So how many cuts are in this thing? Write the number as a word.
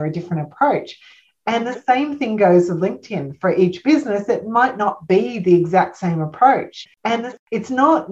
one